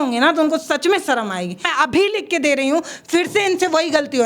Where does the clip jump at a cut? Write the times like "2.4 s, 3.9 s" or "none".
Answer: 1.7 s